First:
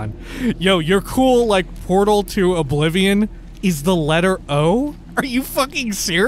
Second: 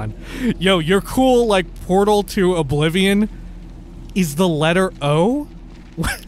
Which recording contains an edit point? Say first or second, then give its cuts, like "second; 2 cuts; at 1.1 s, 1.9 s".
first; 2 cuts; at 3.4 s, 5.0 s